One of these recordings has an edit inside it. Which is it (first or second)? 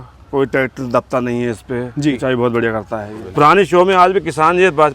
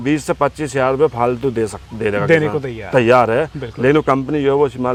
first